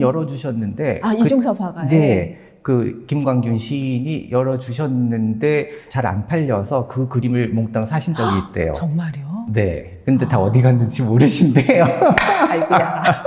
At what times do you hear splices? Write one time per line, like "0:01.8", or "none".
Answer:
none